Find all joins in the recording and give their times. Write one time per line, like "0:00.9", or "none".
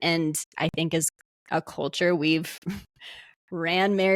none